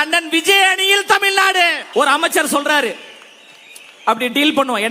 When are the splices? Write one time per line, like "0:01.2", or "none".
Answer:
0:01.8